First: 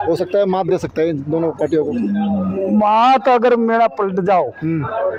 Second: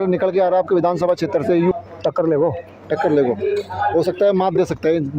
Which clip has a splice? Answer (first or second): second